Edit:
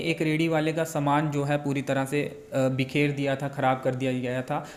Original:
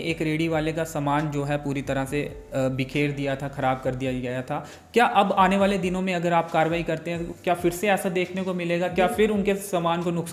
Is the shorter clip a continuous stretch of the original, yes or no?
yes